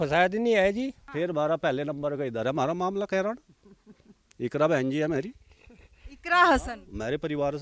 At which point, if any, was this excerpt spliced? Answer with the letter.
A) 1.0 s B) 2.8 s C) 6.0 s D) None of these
A